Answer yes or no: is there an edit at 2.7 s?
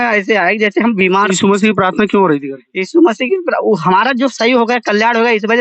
no